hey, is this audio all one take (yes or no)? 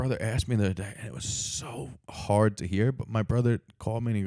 no